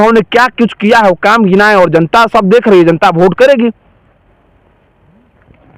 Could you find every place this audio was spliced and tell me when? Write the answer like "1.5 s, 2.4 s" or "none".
none